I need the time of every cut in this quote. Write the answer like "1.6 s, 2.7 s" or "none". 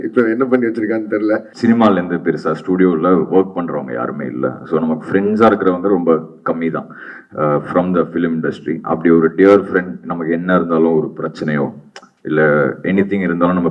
1.5 s